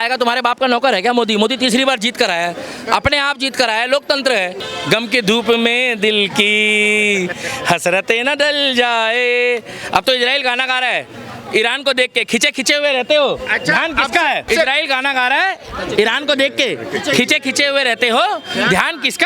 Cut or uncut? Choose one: cut